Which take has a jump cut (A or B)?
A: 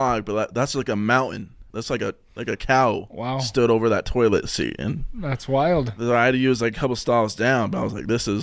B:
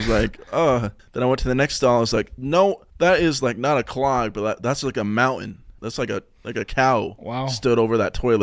B